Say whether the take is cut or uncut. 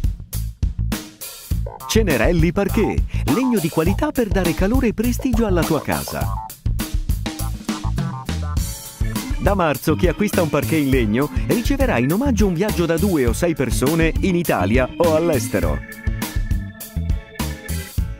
uncut